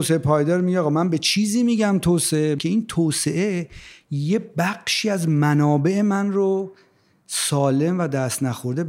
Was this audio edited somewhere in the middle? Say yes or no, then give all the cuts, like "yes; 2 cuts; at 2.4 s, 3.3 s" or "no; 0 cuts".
yes; 1 cut; at 2.6 s